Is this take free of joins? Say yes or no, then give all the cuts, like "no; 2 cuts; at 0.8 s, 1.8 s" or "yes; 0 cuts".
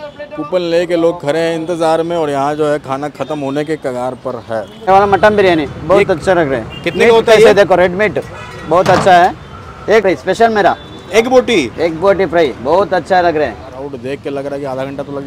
no; 3 cuts; at 4.8 s, 10.1 s, 13.8 s